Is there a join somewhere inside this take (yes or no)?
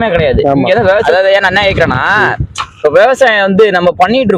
yes